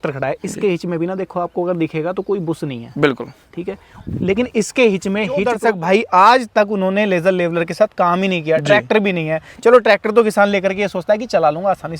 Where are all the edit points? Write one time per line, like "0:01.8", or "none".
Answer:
0:05.6